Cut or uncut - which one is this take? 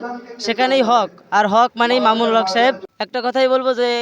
cut